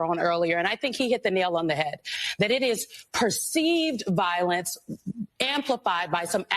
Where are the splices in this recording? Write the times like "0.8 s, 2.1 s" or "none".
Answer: none